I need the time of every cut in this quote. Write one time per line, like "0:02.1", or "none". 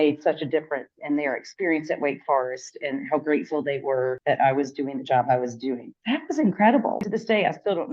0:07.0